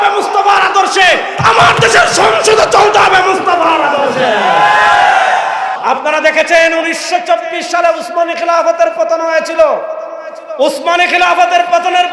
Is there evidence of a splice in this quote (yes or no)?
yes